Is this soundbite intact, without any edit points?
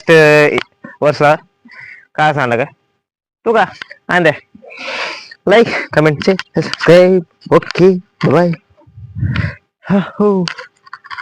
yes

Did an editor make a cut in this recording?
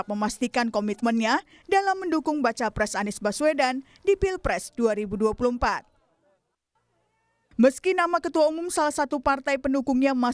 no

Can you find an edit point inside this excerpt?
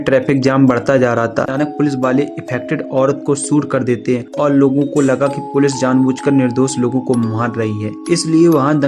yes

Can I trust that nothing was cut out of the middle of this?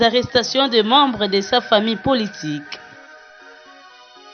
no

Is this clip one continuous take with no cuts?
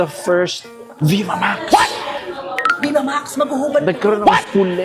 yes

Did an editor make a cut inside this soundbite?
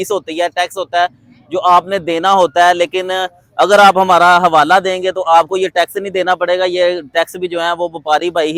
no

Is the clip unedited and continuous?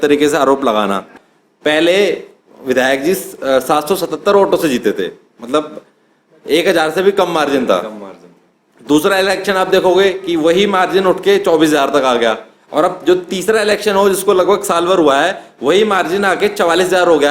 no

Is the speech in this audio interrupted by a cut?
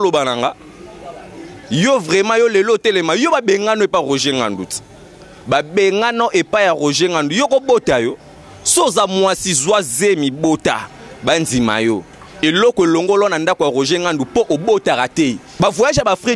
yes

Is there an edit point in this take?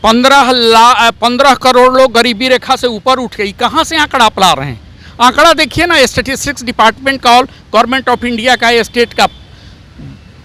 no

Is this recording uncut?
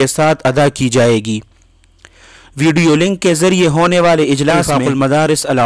no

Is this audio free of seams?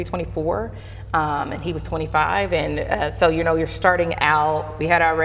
yes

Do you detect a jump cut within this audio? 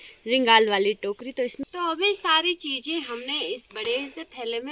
yes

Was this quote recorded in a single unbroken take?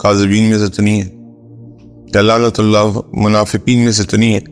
yes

